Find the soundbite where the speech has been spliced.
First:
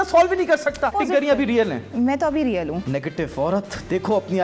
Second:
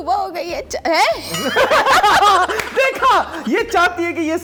first; 2 cuts; at 0.9 s, 2.8 s

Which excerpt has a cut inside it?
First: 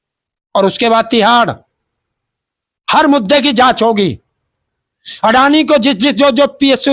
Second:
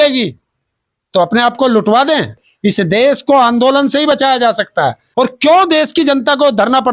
second; 2 cuts; at 2.4 s, 5.0 s

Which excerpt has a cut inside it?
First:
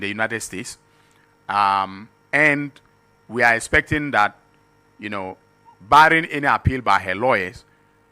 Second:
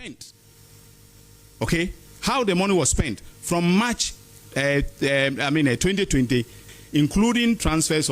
second; 1 cut; at 6.6 s

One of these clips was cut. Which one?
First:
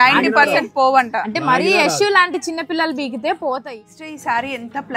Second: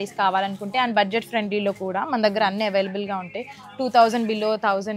first; 1 cut; at 3.7 s

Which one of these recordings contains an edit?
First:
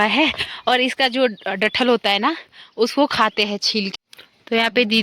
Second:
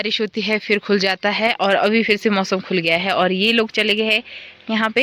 first; 1 cut; at 3.9 s

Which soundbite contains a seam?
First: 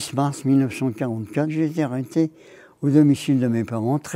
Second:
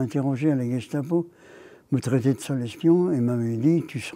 first; 1 cut; at 1.5 s

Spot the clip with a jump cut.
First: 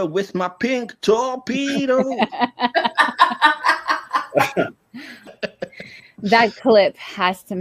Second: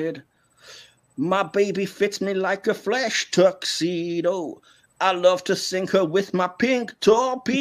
first; 1 cut; at 5.3 s

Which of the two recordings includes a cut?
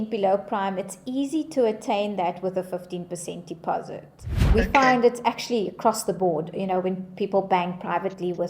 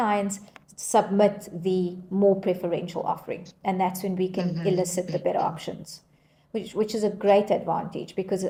first; 1 cut; at 4.5 s

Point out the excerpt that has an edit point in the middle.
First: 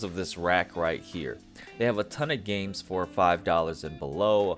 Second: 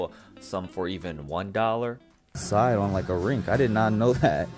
second; 1 cut; at 2.4 s

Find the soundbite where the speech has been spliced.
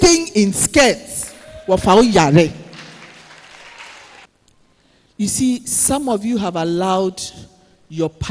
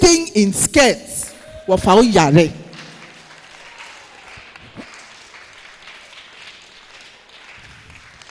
first; 1 cut; at 4.2 s

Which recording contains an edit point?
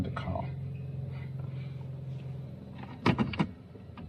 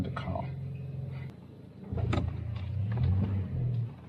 second; 1 cut; at 1.3 s

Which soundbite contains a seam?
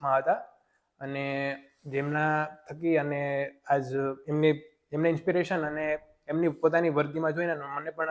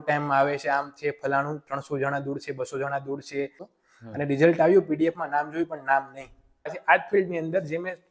second; 2 cuts; at 3.7 s, 6.8 s

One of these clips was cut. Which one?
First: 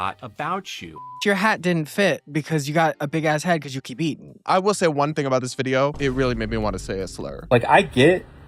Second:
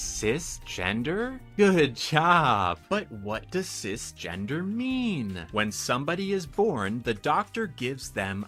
first; 5 cuts; at 1.1 s, 2.2 s, 4.3 s, 6.0 s, 7.4 s

